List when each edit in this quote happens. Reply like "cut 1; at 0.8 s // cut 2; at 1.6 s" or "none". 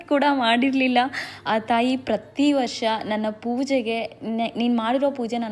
none